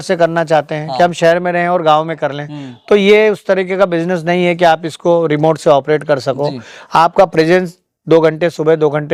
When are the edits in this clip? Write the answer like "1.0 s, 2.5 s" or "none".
none